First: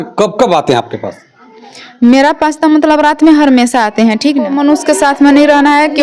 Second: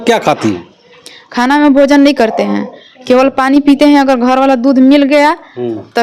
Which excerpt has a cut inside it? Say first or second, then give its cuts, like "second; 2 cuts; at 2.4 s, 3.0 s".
first; 1 cut; at 4.6 s